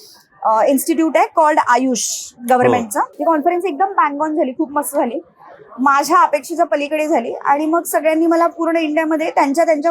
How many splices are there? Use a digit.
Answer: 1